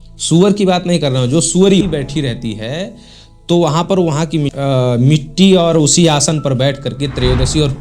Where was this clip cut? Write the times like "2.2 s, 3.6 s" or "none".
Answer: 1.8 s, 4.5 s